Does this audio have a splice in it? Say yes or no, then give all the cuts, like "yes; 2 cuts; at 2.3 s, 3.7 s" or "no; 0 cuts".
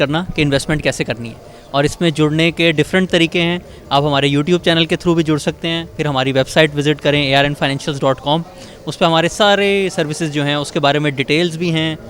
no; 0 cuts